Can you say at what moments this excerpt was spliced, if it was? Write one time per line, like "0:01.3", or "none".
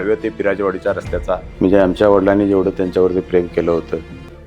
0:01.5